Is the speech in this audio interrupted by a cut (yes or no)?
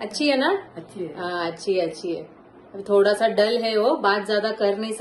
no